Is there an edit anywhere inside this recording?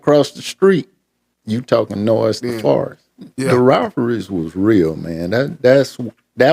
yes; 1 cut; at 3.5 s

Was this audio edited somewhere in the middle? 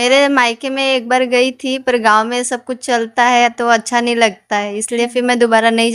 no; 0 cuts

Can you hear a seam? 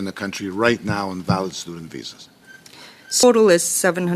yes; 1 cut; at 3.2 s

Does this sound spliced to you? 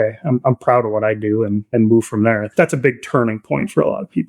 yes; 2 cuts; at 1.6 s, 2.5 s

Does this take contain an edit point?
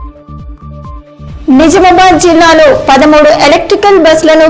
yes; 1 cut; at 1.1 s

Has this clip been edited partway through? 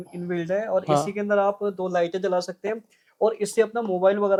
no; 0 cuts

